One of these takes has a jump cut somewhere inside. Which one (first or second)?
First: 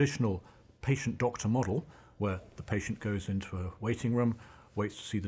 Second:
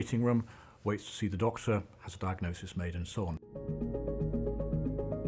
second